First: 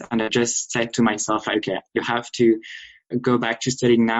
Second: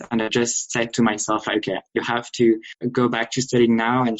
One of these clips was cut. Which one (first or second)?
second